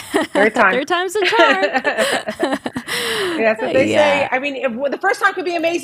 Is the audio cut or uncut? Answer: uncut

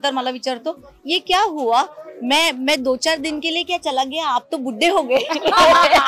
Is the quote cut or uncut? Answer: uncut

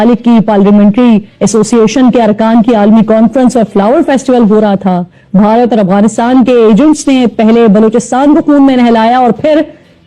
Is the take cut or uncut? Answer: uncut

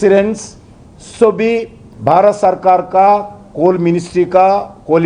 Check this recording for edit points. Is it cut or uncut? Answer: cut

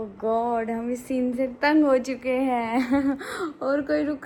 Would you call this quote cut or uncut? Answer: uncut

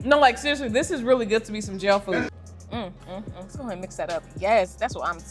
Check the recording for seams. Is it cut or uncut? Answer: cut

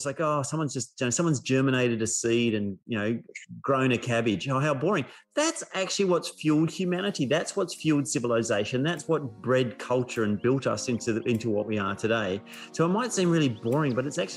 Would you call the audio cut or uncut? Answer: uncut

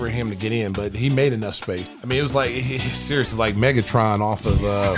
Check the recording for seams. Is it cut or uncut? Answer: cut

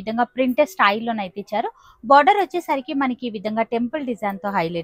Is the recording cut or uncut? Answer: uncut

